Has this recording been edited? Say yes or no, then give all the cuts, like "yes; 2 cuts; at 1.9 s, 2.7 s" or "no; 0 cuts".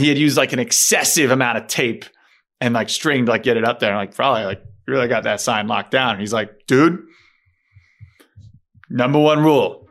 no; 0 cuts